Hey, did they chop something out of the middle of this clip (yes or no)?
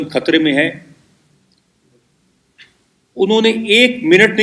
no